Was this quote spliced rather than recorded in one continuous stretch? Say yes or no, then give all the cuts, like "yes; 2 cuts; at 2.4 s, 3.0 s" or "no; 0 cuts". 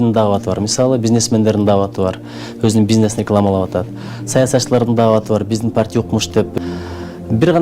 yes; 1 cut; at 6.5 s